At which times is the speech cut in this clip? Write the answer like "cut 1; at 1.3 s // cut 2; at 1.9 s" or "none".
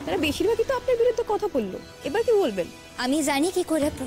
cut 1; at 2.8 s